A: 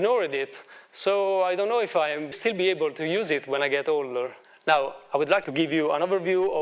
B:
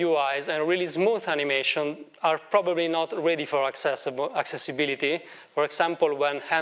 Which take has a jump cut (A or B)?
A